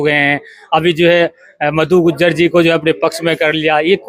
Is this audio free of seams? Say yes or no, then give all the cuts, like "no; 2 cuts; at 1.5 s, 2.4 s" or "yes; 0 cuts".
yes; 0 cuts